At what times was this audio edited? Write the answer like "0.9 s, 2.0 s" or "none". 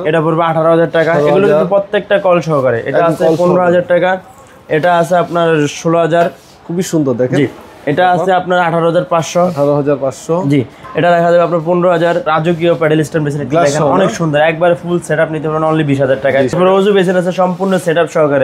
12.3 s, 16.5 s